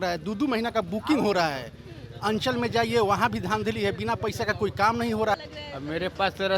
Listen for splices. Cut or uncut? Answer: cut